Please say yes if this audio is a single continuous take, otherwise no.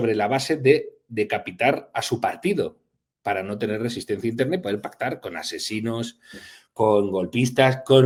yes